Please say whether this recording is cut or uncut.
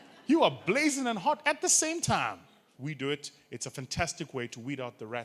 cut